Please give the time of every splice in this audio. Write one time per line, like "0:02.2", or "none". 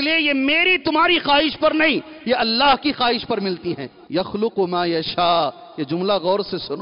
0:03.9

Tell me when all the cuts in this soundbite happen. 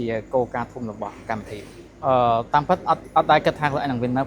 0:01.8

